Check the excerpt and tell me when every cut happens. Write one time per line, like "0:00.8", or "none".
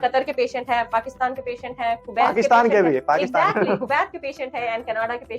none